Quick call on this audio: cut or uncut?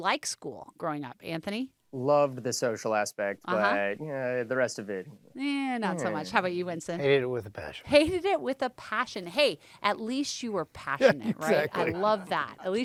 uncut